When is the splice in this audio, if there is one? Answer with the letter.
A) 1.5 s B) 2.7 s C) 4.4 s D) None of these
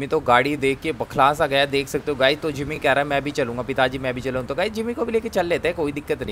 D